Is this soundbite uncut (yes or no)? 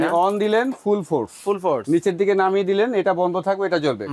yes